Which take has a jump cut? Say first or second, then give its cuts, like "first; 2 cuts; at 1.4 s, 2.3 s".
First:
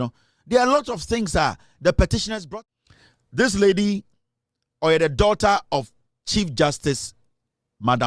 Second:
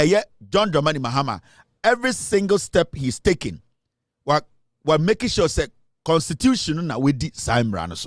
first; 1 cut; at 2.4 s